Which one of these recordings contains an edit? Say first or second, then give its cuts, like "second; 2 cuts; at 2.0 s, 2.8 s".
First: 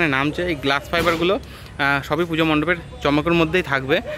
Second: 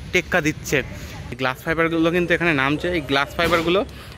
second; 1 cut; at 1.2 s